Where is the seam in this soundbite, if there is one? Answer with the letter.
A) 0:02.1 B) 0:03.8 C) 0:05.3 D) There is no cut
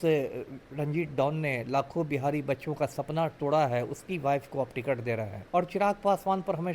C